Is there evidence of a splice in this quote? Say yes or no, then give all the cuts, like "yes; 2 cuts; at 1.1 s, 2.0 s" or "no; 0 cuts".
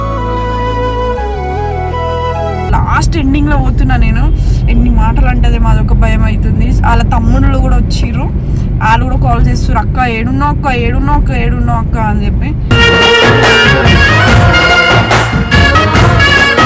yes; 1 cut; at 2.7 s